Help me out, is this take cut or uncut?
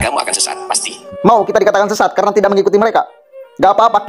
cut